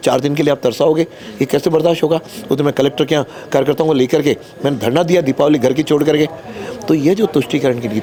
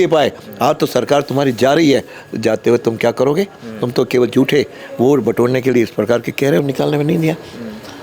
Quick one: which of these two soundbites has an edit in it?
second; 1 cut; at 6.6 s

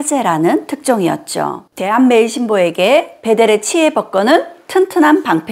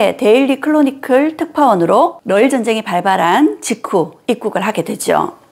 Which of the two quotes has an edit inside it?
first; 1 cut; at 1.7 s

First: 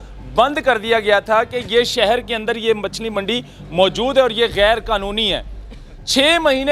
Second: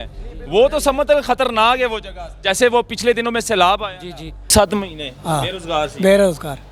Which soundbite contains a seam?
second; 1 cut; at 4.5 s

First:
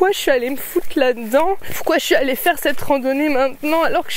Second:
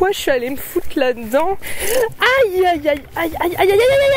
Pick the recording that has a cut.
second; 1 cut; at 1.7 s

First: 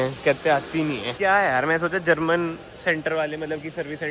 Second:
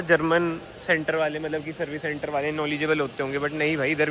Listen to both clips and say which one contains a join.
first; 1 cut; at 1.1 s

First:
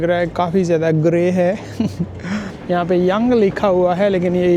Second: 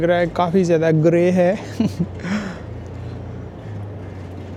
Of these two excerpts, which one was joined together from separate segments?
first; 1 cut; at 2.5 s

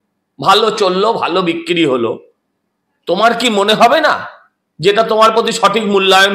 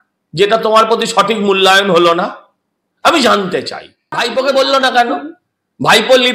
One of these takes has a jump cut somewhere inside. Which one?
second; 1 cut; at 4.0 s

